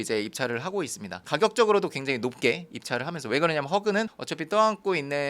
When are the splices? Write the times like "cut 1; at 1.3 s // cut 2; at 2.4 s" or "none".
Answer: cut 1; at 1.2 s